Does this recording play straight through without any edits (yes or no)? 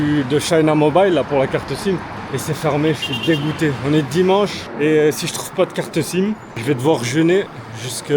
no